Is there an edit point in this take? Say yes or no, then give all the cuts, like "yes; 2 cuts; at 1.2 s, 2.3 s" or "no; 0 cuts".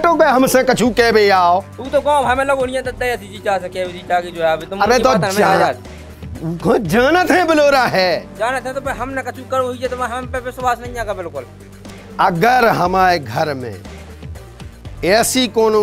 no; 0 cuts